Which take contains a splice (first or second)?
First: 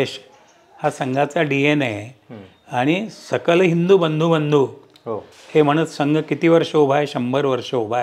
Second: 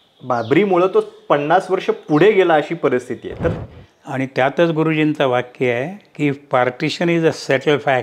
second